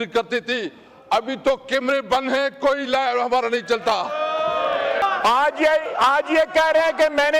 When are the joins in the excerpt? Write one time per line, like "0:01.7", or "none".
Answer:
0:05.0